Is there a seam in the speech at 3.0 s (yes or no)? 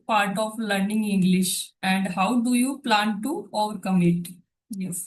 no